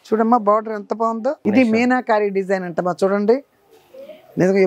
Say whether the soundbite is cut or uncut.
cut